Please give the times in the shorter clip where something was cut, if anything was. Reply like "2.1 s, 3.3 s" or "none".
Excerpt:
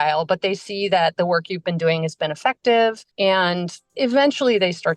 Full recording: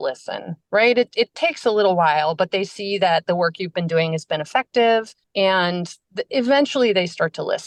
3.3 s